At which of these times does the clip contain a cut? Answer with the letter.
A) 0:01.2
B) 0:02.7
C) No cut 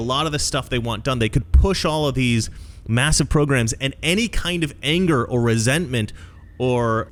C